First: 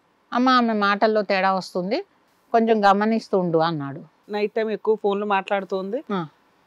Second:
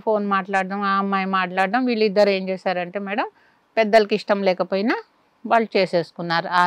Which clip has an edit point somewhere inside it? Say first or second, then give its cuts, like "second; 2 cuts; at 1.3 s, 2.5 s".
first; 1 cut; at 4.2 s